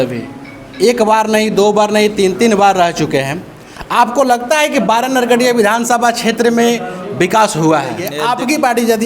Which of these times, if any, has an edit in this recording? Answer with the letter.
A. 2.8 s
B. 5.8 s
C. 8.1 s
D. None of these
C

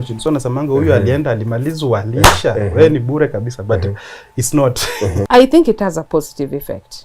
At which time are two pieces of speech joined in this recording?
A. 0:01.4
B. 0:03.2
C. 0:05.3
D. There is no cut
C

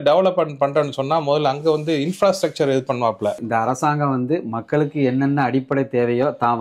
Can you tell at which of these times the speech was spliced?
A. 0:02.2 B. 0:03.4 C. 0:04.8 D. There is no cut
B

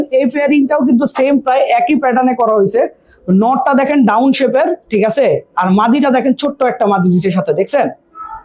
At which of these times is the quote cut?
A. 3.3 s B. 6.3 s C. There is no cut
C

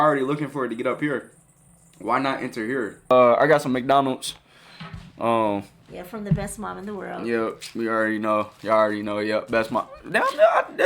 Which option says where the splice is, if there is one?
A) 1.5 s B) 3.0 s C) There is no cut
B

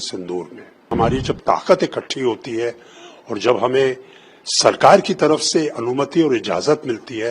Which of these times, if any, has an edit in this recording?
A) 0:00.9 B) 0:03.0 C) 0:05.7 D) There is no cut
A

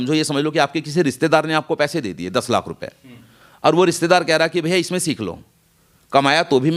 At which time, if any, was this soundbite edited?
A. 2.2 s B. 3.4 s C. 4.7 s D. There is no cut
D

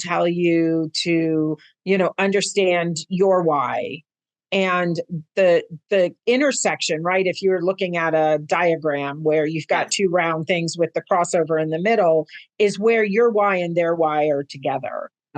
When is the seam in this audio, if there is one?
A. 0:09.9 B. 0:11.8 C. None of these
C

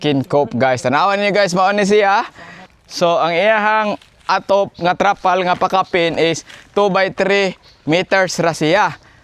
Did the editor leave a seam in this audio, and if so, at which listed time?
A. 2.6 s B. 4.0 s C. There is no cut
A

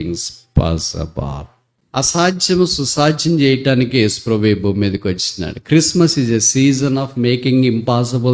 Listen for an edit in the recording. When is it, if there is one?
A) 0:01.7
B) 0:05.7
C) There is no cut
A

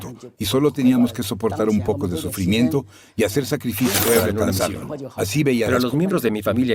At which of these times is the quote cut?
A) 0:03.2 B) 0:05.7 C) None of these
B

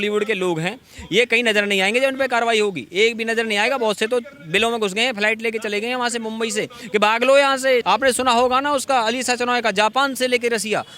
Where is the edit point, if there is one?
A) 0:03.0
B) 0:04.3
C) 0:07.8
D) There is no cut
C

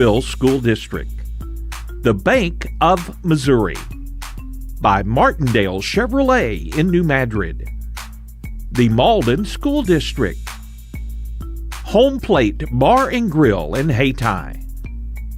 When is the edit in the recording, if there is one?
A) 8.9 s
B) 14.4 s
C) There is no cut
B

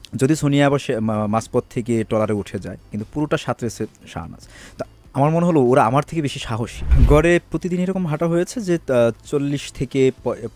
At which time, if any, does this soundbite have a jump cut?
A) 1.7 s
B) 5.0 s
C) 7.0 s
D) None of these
C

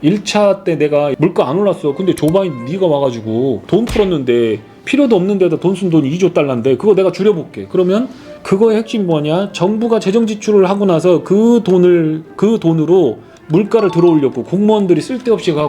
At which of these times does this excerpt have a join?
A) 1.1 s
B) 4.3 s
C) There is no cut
A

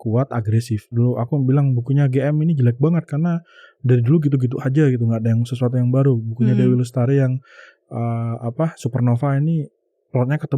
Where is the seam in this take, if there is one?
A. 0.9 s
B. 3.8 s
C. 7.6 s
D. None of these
A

